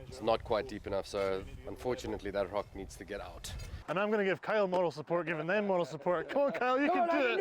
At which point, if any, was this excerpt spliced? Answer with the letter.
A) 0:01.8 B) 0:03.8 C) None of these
B